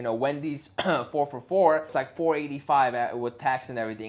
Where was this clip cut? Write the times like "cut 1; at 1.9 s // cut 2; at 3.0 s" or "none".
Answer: cut 1; at 1.9 s

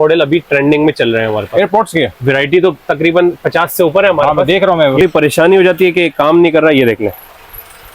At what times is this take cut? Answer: cut 1; at 5.0 s

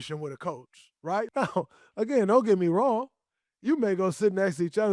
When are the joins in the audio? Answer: cut 1; at 1.3 s

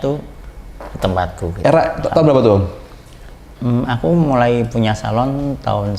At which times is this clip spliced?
none

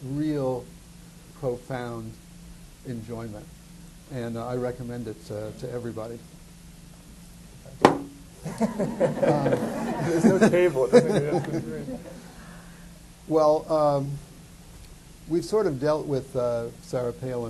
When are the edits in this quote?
cut 1; at 4.6 s

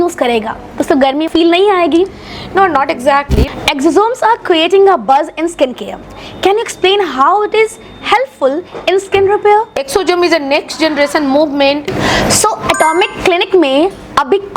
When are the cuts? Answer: cut 1; at 3.5 s // cut 2; at 11.8 s

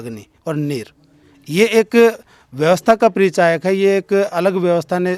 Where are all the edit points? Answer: none

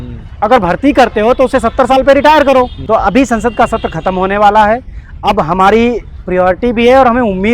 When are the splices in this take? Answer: cut 1; at 2.8 s

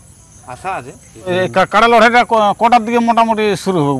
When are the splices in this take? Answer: cut 1; at 1.3 s

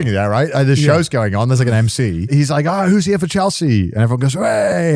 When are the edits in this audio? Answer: cut 1; at 2.3 s

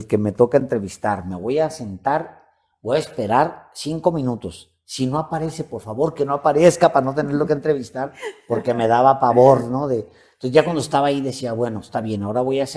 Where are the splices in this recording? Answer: none

